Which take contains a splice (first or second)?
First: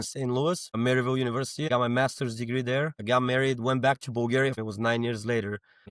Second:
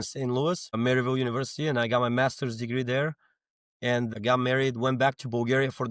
first